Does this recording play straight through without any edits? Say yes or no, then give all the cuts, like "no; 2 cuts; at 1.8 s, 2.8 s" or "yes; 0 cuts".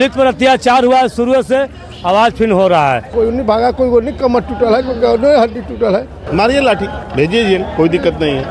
no; 2 cuts; at 3.1 s, 6.2 s